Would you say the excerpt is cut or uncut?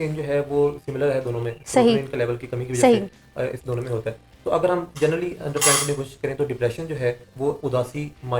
uncut